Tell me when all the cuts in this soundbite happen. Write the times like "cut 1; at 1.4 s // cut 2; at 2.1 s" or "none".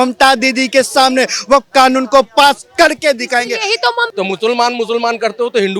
cut 1; at 4.1 s